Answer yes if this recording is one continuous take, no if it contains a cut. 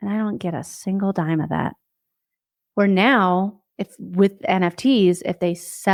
yes